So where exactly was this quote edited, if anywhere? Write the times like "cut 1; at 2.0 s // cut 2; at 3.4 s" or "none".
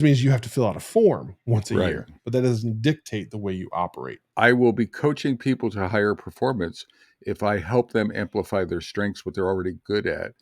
cut 1; at 4.2 s